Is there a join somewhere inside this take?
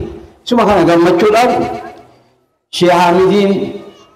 no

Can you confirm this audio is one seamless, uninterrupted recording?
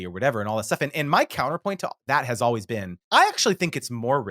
no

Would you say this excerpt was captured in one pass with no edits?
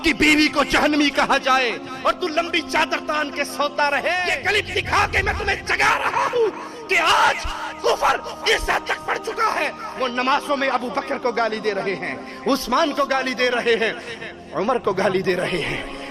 no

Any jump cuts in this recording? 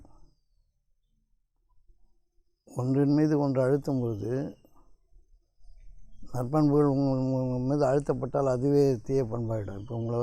no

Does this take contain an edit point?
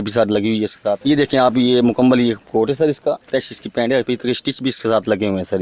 yes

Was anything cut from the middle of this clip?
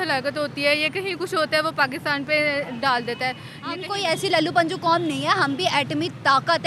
yes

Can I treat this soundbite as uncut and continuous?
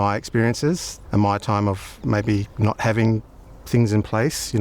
no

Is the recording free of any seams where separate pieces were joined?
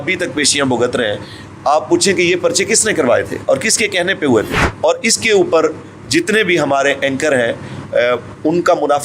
no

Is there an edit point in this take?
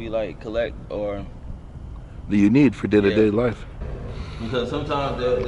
yes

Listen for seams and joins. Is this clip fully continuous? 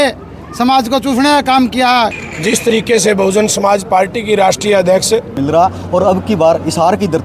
no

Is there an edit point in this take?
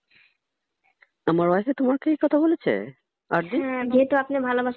yes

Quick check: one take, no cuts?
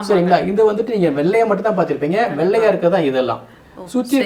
yes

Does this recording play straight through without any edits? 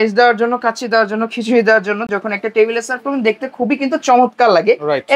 yes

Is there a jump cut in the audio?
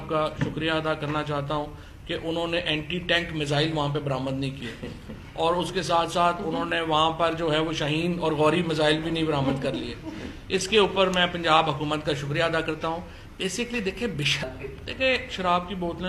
yes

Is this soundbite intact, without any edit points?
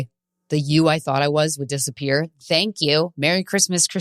yes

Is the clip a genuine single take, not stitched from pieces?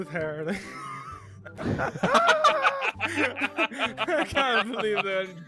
yes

